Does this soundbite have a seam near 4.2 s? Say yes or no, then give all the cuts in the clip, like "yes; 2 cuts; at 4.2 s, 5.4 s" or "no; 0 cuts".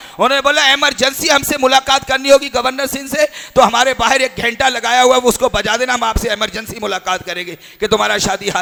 no; 0 cuts